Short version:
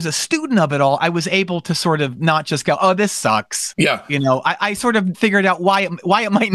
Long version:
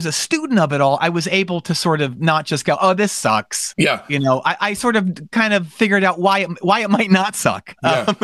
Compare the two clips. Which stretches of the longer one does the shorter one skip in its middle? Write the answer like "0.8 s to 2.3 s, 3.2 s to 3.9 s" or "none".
5.1 s to 5.7 s